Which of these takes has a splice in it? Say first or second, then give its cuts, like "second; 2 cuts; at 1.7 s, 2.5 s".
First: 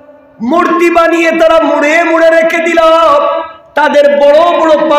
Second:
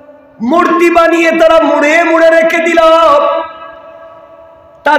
first; 1 cut; at 3.6 s